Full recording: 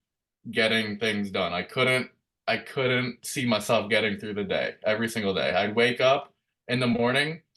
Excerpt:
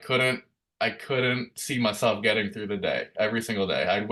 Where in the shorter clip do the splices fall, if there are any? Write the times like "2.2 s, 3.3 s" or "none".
none